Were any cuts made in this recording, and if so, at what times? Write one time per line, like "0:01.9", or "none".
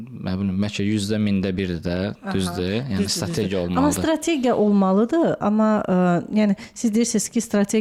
none